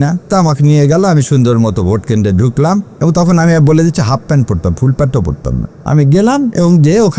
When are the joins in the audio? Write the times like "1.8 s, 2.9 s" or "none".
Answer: 5.7 s

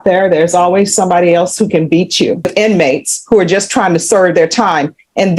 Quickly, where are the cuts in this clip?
2.5 s

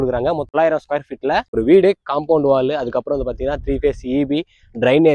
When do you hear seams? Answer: 1.5 s

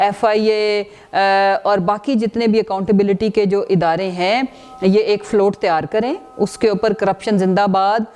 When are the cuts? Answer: none

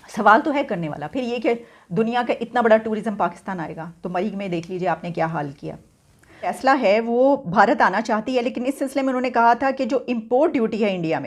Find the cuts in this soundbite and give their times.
6.6 s

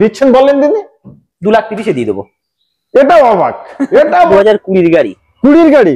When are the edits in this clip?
4.3 s

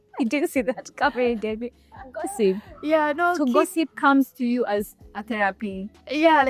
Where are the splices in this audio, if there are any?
none

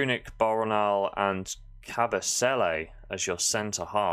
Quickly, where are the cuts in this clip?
none

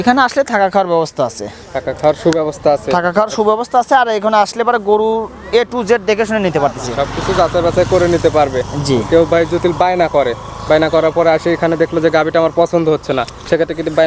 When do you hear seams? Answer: none

